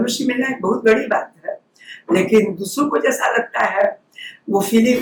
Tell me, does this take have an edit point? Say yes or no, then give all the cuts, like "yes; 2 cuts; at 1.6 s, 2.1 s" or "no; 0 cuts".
no; 0 cuts